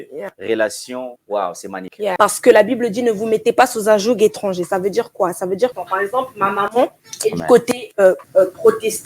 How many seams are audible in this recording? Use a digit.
5